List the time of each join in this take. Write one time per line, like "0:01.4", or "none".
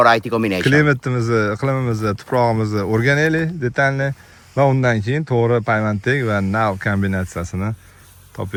none